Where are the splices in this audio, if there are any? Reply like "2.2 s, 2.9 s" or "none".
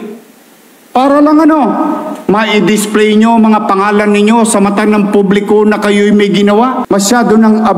6.8 s